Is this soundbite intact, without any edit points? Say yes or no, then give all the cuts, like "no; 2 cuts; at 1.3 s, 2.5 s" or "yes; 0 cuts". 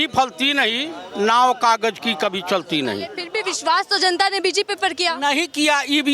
no; 1 cut; at 3.2 s